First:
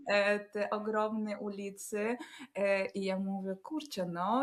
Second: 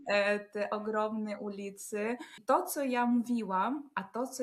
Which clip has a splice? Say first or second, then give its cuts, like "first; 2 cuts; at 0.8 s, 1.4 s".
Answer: second; 1 cut; at 2.4 s